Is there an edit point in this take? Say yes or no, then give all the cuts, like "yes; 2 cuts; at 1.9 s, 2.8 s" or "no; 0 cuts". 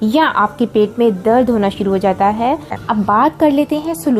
yes; 1 cut; at 2.8 s